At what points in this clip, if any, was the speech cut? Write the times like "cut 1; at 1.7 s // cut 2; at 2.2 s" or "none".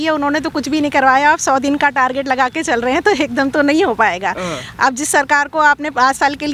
none